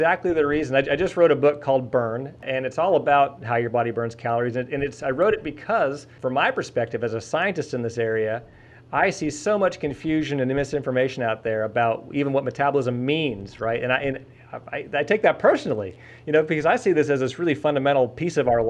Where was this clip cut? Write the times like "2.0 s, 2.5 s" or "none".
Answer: 2.4 s, 6.1 s